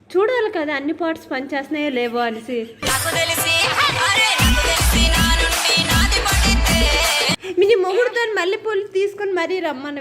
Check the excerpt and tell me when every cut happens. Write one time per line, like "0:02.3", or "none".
0:07.4